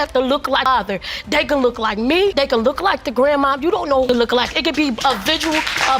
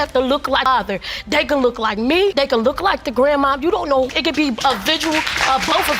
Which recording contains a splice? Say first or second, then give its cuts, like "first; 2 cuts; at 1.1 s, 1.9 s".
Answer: second; 1 cut; at 4.1 s